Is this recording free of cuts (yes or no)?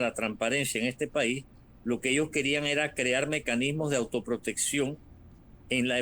yes